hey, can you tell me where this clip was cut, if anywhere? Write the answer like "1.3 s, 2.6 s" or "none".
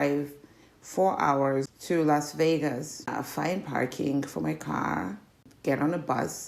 1.7 s, 3.1 s, 5.5 s